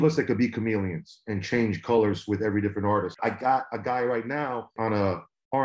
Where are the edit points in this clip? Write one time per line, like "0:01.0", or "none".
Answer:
0:03.2
0:04.7